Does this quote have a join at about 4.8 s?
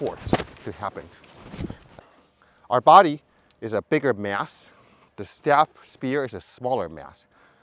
no; 1 cut; at 2.0 s

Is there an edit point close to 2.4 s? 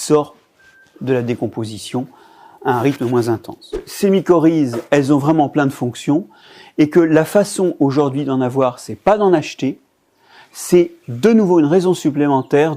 no; 1 cut; at 3.9 s

